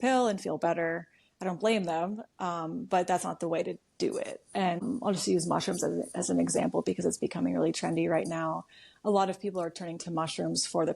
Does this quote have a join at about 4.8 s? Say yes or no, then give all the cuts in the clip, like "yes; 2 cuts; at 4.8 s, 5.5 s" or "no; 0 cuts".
yes; 1 cut; at 4.8 s